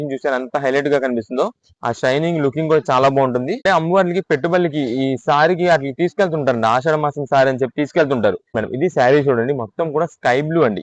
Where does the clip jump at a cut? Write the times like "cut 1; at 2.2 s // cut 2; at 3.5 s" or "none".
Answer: cut 1; at 3.6 s // cut 2; at 8.5 s